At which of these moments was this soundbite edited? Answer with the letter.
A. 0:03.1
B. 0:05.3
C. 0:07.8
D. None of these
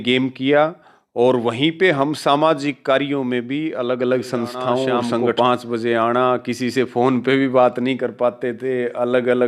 B